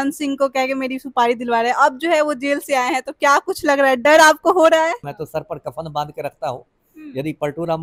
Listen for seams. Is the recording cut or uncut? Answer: cut